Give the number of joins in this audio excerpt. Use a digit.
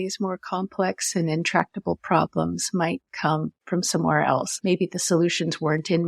2